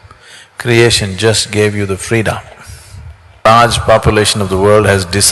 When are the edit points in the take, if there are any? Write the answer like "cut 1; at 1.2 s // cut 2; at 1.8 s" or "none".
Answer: cut 1; at 3.4 s